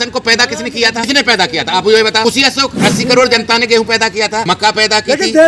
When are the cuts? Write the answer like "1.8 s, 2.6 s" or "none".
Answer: 1.1 s, 2.2 s, 4.4 s